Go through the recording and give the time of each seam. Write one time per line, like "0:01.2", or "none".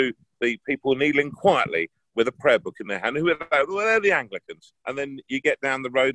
0:04.7